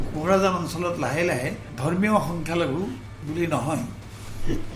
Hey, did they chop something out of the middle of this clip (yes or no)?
yes